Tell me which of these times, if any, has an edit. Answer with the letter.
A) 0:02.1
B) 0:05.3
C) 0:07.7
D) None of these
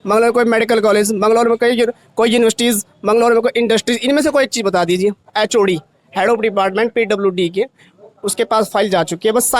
B